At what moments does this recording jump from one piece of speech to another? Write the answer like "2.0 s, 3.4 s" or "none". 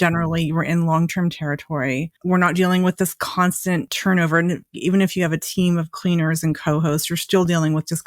3.9 s, 4.7 s